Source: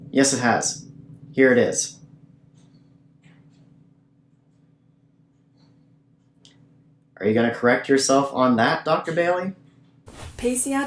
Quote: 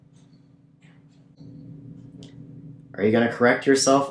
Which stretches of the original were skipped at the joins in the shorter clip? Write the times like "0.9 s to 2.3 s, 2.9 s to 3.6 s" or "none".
3.8 s to 5.6 s